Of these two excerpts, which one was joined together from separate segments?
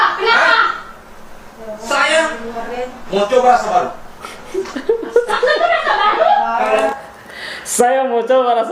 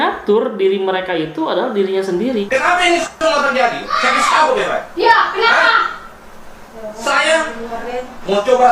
second; 1 cut; at 2.4 s

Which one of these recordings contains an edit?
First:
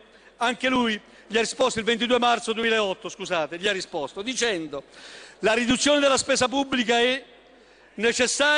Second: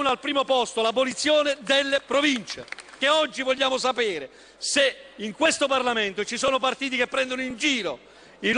second; 1 cut; at 3.0 s

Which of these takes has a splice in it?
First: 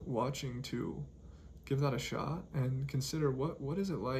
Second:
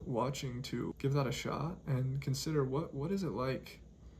second; 1 cut; at 1.0 s

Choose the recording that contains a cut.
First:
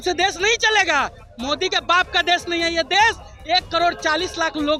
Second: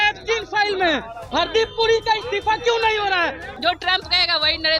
second; 2 cuts; at 1.2 s, 3.5 s

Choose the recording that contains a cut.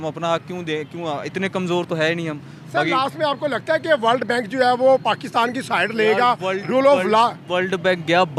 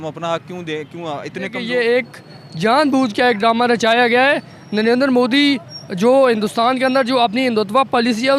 second; 1 cut; at 1.6 s

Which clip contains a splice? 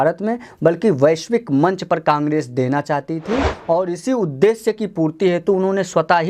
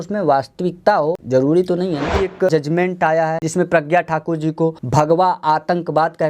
second; 4 cuts; at 1.2 s, 2.5 s, 3.4 s, 4.8 s

